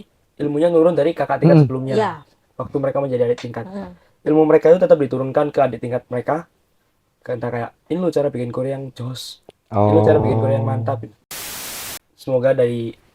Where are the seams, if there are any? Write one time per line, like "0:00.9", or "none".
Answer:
0:11.6